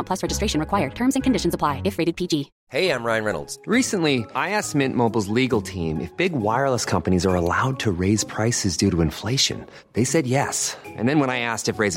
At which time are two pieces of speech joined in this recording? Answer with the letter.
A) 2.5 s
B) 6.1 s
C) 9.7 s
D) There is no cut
A